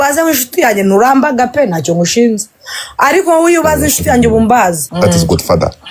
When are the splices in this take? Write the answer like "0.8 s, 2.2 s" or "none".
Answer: 4.8 s